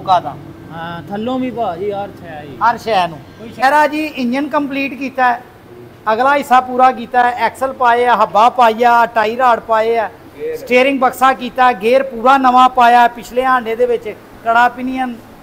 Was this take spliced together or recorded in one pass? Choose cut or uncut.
cut